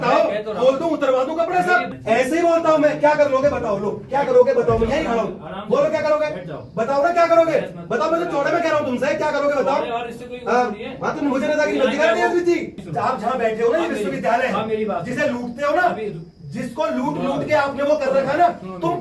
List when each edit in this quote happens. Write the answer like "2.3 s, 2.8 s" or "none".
1.9 s, 12.8 s

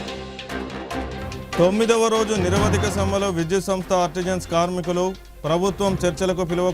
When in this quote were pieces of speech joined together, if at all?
1.0 s

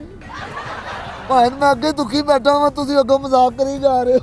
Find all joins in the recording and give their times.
none

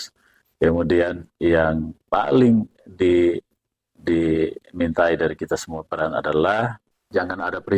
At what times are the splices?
6.9 s

